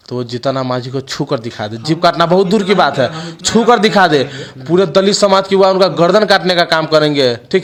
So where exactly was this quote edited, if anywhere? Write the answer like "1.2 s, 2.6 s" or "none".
none